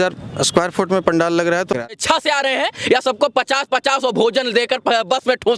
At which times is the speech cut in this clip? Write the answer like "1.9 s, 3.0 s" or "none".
1.9 s